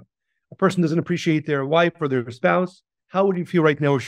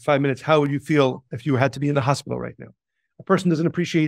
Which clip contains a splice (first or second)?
first